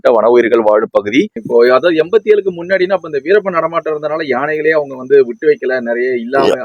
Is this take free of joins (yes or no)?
no